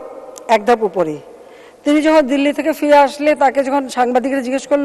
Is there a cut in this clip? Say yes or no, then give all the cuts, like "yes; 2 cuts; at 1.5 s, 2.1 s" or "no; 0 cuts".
no; 0 cuts